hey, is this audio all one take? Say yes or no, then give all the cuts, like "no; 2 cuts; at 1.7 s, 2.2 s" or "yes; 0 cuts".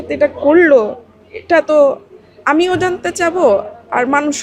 yes; 0 cuts